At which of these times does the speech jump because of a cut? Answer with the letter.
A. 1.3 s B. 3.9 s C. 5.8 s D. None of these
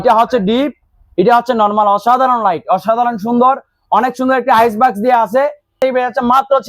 C